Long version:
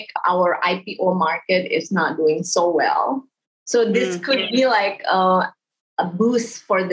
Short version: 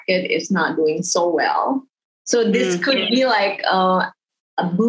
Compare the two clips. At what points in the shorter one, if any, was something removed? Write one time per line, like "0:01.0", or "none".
none